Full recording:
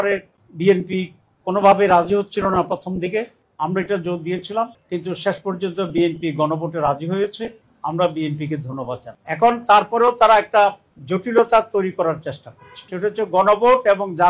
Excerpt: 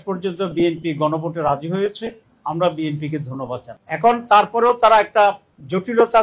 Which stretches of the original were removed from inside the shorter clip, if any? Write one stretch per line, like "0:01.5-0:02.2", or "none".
none